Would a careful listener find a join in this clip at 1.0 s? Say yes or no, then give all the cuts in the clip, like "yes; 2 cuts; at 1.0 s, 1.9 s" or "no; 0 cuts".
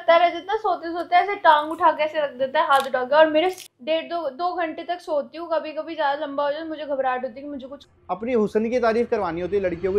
no; 2 cuts; at 3.6 s, 7.9 s